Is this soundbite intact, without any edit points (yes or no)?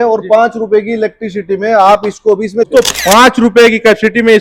no